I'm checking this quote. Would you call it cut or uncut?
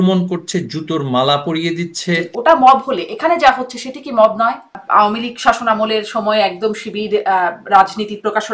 cut